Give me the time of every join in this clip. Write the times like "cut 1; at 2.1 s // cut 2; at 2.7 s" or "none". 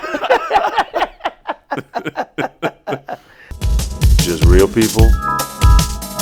cut 1; at 3.3 s